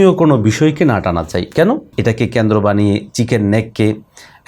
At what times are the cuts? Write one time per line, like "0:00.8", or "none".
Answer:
0:01.9